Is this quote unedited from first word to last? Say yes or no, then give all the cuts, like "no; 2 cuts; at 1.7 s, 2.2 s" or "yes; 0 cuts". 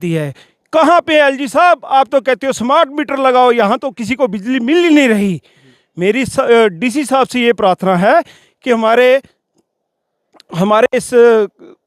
yes; 0 cuts